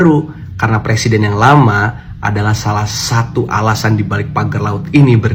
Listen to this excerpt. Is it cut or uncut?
uncut